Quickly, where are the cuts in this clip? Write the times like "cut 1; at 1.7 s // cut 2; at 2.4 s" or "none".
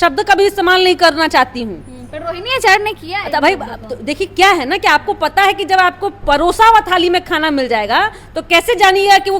none